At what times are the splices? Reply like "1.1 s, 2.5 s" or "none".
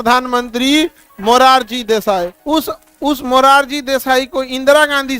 2.4 s

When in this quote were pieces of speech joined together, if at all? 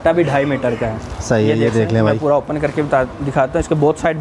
none

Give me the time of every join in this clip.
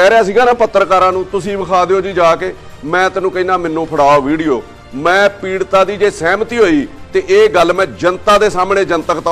none

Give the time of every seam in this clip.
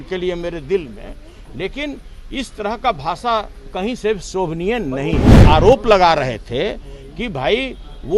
5.4 s

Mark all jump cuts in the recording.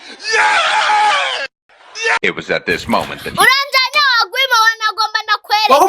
2.0 s

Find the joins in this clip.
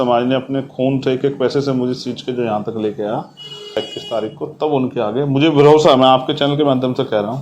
3.9 s

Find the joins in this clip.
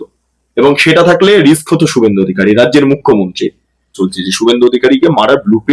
4.0 s

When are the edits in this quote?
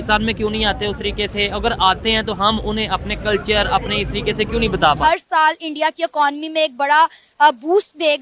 5.0 s

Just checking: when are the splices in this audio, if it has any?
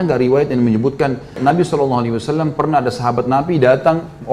1.4 s

